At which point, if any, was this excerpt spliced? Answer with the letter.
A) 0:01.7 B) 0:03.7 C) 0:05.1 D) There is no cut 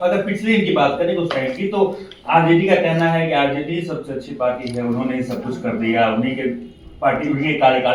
D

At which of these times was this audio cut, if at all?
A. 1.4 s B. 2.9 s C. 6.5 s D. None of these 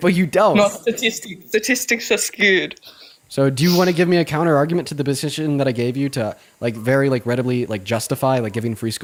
D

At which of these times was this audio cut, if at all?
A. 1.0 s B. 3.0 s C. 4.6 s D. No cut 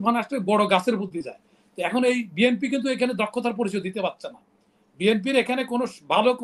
D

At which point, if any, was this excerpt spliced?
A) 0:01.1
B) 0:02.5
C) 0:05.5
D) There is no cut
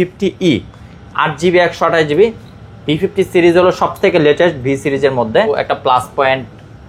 C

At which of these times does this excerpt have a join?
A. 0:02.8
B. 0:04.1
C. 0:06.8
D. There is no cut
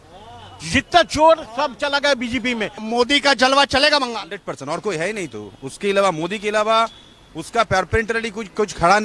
A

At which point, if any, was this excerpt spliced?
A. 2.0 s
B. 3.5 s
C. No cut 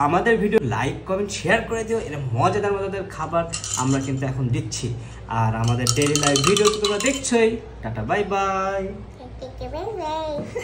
C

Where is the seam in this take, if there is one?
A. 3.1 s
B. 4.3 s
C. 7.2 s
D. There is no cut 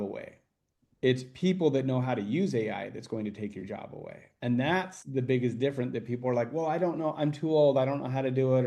D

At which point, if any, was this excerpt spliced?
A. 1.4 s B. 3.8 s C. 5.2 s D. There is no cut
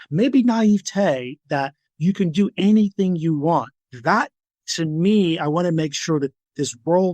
B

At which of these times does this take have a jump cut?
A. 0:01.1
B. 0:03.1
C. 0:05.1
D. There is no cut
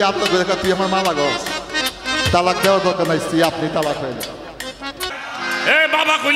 C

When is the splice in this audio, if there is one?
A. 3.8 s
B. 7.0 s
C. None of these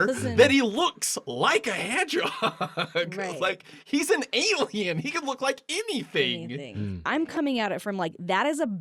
B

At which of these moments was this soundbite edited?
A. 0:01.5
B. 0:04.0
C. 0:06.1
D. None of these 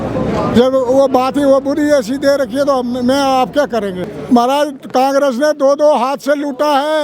B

